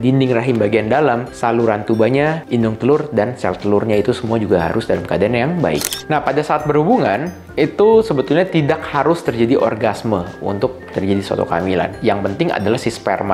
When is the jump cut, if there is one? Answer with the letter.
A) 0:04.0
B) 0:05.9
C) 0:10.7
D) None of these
B